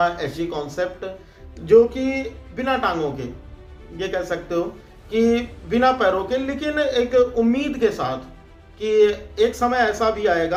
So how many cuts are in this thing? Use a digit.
0